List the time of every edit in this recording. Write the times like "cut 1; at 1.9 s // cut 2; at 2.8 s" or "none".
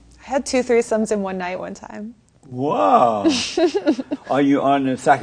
cut 1; at 4.1 s